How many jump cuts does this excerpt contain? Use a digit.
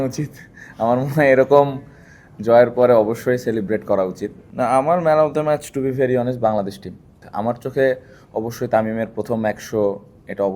2